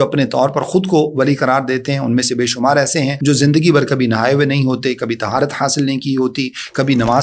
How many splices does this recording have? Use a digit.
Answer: 1